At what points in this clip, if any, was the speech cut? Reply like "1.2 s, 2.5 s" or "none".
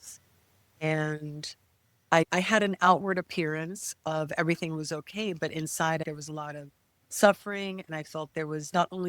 2.3 s, 6.0 s